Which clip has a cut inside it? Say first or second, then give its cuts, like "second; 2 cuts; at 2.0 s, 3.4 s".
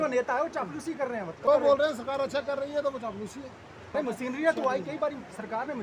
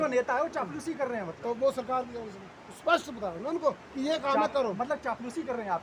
first; 2 cuts; at 1.5 s, 3.9 s